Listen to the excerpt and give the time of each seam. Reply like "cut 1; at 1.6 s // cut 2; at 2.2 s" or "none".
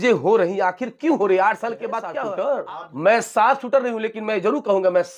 cut 1; at 2.1 s